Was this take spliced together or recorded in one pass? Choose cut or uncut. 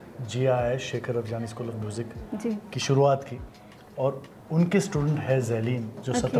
uncut